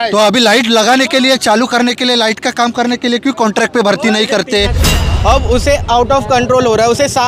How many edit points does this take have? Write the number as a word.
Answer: one